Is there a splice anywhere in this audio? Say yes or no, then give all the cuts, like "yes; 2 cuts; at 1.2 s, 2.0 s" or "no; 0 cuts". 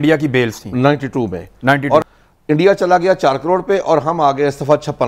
yes; 1 cut; at 2.0 s